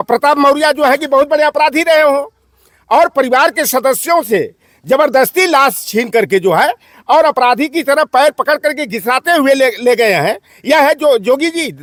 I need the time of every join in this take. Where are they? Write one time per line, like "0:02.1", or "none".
none